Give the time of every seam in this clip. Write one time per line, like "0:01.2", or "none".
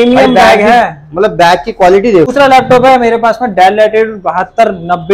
0:02.3